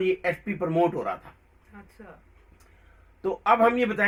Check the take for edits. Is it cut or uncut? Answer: uncut